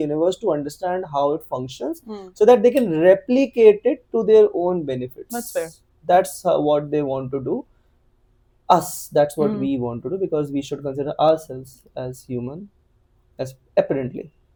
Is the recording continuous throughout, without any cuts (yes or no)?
yes